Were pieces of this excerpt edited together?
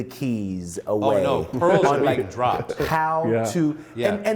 no; 0 cuts

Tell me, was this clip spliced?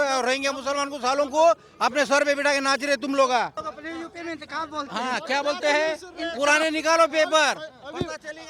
yes; 1 cut; at 3.7 s

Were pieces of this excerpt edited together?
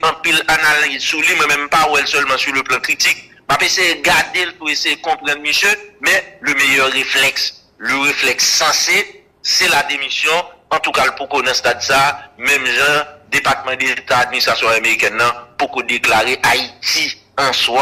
no; 0 cuts

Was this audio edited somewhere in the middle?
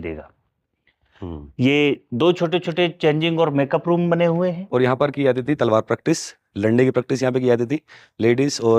yes; 1 cut; at 4.6 s

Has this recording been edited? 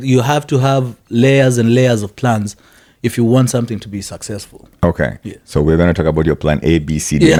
no; 0 cuts

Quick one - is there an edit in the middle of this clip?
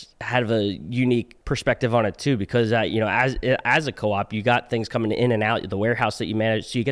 yes; 1 cut; at 1.4 s

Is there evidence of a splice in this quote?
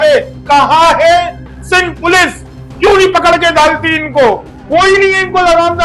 yes; 1 cut; at 4.5 s

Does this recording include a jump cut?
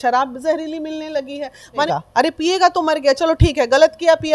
yes; 1 cut; at 1.9 s

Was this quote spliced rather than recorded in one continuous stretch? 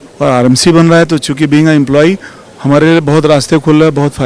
no; 0 cuts

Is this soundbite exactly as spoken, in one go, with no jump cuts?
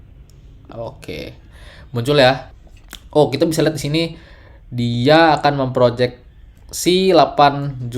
no; 1 cut; at 2.5 s

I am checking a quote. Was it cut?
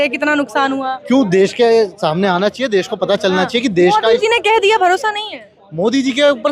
no; 0 cuts

